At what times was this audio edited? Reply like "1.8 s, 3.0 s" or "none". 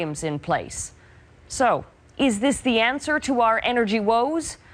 2.6 s